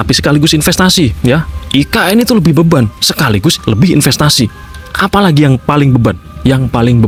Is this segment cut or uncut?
uncut